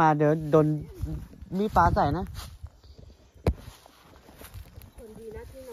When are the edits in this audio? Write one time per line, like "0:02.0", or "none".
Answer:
none